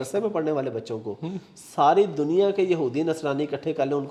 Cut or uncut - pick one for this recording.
uncut